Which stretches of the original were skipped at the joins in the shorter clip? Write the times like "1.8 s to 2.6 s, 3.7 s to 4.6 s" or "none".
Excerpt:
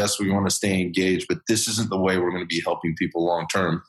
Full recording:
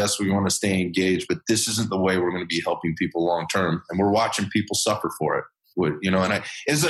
none

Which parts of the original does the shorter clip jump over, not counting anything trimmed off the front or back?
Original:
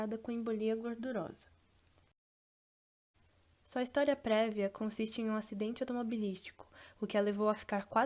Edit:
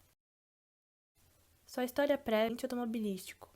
4.5 s to 5.7 s

